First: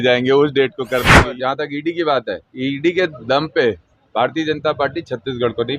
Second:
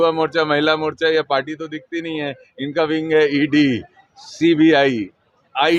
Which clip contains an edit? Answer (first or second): first